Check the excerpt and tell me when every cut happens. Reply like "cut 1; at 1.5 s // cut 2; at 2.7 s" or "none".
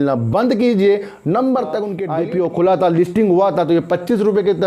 cut 1; at 2.0 s